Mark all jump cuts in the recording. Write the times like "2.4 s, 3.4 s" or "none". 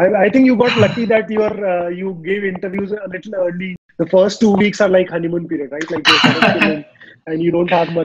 3.8 s